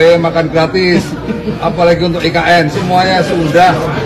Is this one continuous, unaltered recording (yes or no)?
yes